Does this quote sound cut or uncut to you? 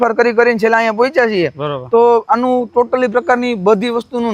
uncut